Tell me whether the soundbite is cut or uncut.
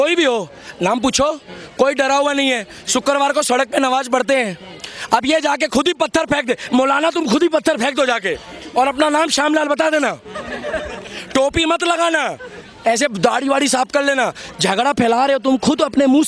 uncut